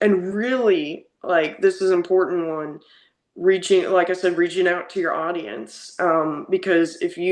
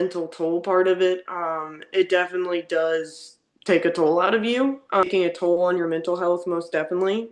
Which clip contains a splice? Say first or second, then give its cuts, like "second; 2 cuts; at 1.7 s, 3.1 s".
second; 1 cut; at 5.1 s